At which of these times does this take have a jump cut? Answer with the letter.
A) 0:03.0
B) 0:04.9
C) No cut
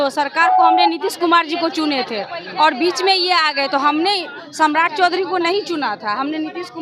C